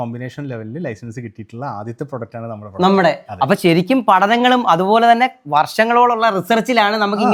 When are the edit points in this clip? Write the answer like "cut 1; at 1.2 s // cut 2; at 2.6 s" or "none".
none